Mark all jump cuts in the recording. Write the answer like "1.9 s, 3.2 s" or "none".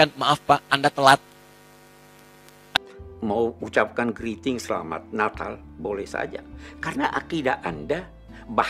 2.5 s